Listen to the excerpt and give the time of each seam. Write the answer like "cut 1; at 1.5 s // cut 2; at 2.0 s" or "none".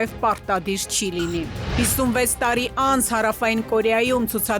cut 1; at 1.8 s

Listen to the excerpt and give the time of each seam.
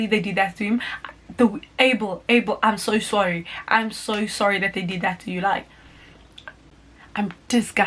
cut 1; at 6.7 s

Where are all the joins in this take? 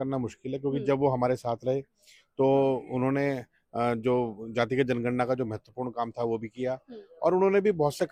none

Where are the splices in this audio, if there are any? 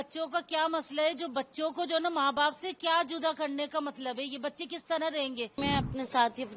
cut 1; at 5.6 s

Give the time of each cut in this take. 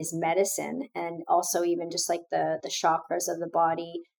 none

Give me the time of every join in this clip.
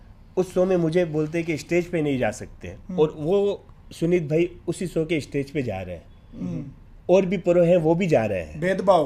none

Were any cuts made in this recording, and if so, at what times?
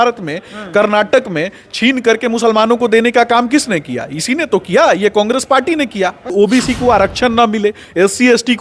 cut 1; at 6.3 s

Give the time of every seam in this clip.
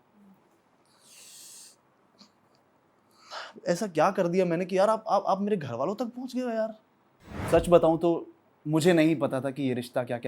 cut 1; at 7.4 s

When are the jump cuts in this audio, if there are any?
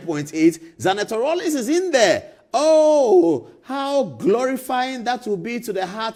none

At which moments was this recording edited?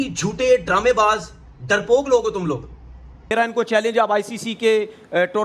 cut 1; at 3.3 s

